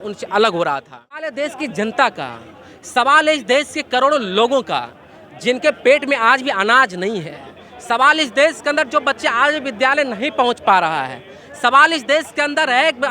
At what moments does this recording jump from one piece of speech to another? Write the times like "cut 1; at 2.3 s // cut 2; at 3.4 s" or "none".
cut 1; at 1.3 s